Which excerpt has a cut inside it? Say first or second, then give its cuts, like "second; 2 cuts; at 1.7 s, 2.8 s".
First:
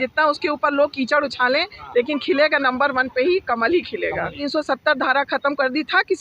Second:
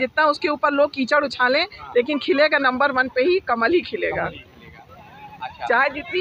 first; 1 cut; at 4.5 s